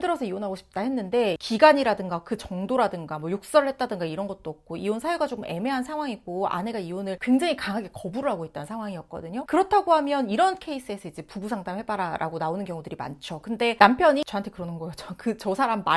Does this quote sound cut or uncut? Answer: cut